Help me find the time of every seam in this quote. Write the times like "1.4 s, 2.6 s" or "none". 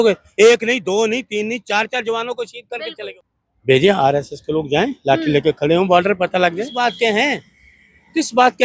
3.1 s, 6.8 s